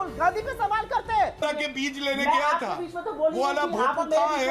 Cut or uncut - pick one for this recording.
cut